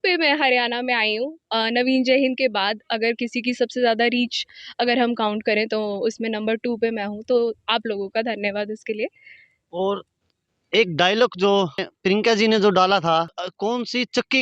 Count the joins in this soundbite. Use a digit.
2